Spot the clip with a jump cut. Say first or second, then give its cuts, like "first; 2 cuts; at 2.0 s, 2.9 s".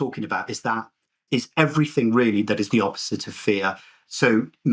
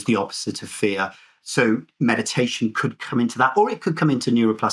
first; 1 cut; at 1.2 s